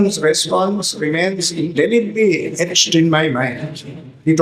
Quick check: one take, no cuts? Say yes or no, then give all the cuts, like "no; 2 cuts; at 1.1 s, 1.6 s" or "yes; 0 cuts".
yes; 0 cuts